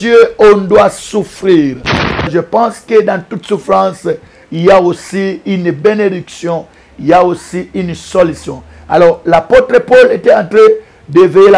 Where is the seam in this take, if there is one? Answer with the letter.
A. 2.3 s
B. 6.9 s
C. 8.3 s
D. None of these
A